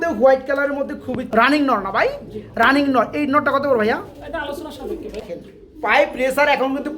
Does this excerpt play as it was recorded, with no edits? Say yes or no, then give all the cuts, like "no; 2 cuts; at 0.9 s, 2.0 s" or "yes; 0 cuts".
no; 2 cuts; at 1.4 s, 5.1 s